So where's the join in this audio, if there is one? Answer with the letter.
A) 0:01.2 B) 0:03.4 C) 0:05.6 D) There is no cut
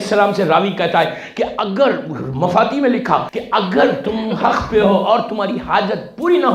B